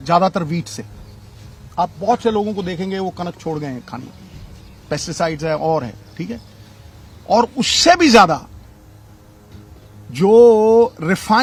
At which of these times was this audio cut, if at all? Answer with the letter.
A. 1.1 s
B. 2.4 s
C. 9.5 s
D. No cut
D